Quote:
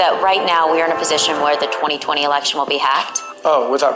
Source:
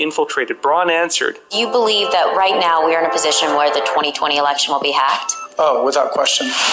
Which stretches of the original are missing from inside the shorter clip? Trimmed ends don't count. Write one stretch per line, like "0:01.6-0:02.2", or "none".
none